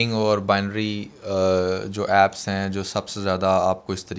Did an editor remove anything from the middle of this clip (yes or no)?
no